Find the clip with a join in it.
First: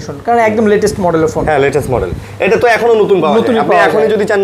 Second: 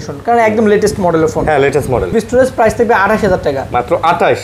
second; 1 cut; at 2.2 s

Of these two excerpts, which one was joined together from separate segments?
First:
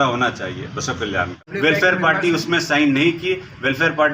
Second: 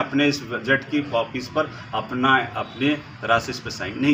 first; 1 cut; at 1.5 s

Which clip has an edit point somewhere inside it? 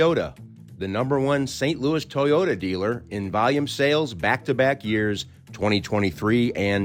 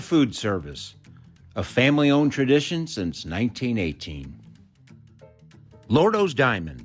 second; 2 cuts; at 4.3 s, 5.8 s

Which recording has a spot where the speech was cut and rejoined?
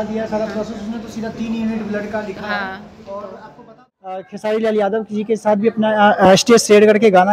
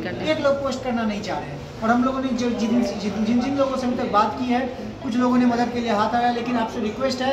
first; 1 cut; at 4.2 s

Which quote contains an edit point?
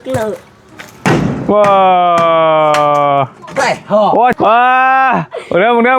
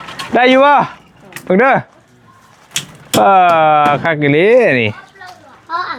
first; 1 cut; at 4.4 s

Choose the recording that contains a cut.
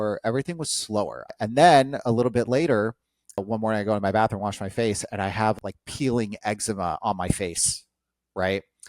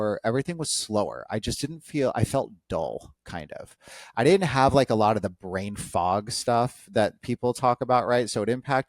first; 1 cut; at 1.2 s

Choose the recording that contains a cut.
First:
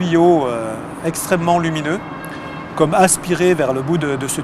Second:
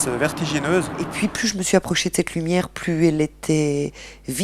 second; 1 cut; at 1.1 s

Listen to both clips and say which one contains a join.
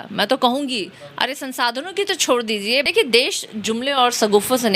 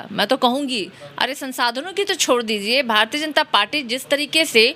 first; 1 cut; at 2.8 s

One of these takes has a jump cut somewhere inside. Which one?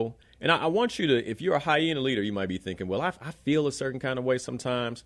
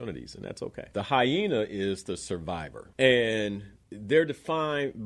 second; 3 cuts; at 0.9 s, 2.8 s, 3.7 s

